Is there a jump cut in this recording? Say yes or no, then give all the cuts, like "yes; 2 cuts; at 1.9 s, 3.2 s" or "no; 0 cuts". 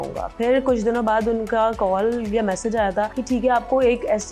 yes; 1 cut; at 3.2 s